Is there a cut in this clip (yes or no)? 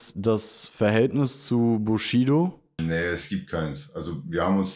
yes